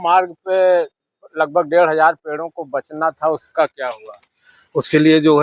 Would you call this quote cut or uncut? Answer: uncut